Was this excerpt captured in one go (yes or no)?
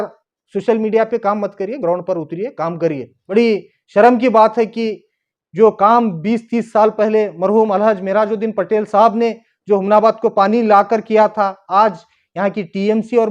no